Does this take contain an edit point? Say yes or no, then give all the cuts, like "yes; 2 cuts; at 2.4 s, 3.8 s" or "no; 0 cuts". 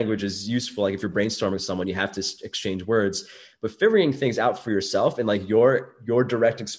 no; 0 cuts